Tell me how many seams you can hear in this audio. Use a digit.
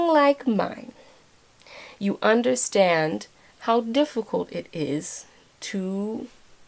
0